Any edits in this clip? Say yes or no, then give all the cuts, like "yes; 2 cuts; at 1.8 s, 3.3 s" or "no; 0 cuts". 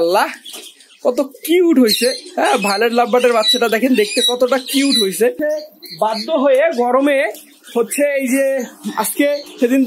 yes; 1 cut; at 5.4 s